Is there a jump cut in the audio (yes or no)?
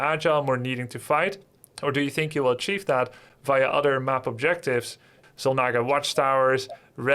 yes